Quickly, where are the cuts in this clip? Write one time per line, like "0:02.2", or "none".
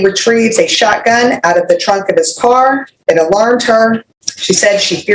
0:02.9
0:04.1